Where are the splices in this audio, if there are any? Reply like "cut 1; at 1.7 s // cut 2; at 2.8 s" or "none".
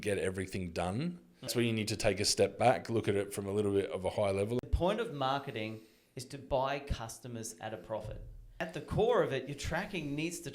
cut 1; at 1.5 s // cut 2; at 4.6 s // cut 3; at 8.6 s